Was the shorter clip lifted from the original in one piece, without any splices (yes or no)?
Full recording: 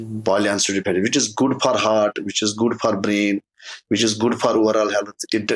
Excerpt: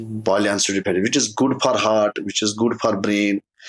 yes